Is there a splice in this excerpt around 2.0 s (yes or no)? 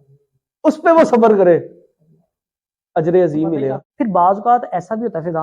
no